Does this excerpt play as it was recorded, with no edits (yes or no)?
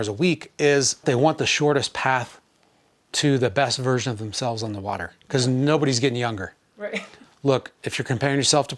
no